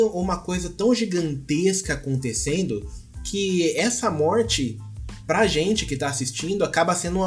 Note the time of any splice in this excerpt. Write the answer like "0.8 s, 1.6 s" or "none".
none